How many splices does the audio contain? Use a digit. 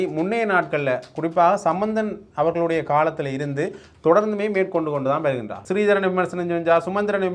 1